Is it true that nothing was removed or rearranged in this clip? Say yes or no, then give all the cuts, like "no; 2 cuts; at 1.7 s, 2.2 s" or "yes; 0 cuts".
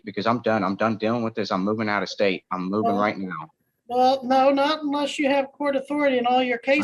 yes; 0 cuts